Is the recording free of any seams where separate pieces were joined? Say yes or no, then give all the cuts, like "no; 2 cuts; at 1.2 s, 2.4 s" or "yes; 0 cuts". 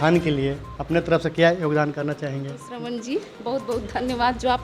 no; 1 cut; at 2.7 s